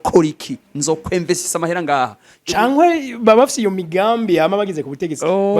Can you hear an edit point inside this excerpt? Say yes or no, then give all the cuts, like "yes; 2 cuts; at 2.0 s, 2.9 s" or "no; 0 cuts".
yes; 1 cut; at 2.3 s